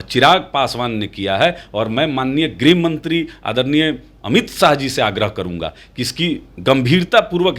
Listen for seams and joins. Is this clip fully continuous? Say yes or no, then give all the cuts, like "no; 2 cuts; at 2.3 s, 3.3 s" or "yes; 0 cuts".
yes; 0 cuts